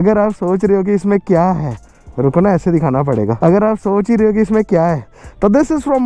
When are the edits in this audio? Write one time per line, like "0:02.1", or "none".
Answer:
none